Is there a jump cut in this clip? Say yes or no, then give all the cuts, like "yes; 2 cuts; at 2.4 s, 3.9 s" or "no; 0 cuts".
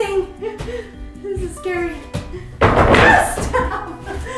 no; 0 cuts